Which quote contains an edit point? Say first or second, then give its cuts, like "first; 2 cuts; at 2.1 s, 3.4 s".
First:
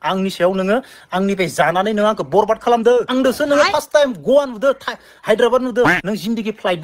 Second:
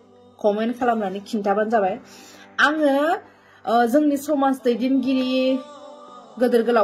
first; 1 cut; at 3.1 s